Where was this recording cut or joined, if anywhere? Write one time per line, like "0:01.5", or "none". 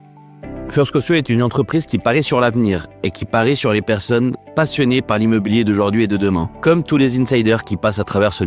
0:06.5